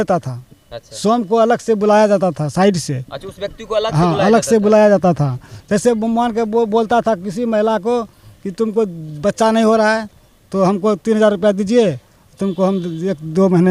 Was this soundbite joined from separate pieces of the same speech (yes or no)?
no